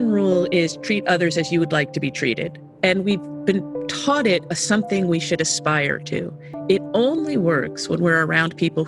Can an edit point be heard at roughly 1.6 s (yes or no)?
no